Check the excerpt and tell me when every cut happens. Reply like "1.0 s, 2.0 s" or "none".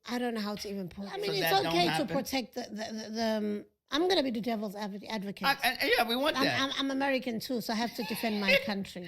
1.2 s